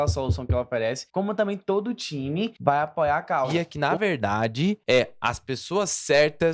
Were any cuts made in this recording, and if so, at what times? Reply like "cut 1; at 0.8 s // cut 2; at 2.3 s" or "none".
cut 1; at 1.0 s // cut 2; at 2.5 s // cut 3; at 3.7 s // cut 4; at 4.8 s